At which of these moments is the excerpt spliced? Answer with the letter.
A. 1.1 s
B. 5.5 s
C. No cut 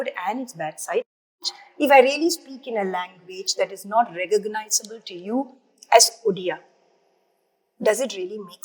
A